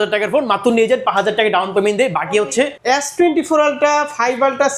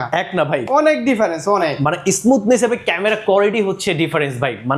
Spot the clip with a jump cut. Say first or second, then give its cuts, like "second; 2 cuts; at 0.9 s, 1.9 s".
first; 1 cut; at 2.8 s